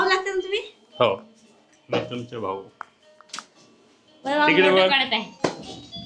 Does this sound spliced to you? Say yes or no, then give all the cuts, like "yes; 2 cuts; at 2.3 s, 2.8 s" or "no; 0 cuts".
no; 0 cuts